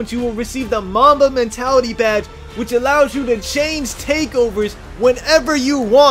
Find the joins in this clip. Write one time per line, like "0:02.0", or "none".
none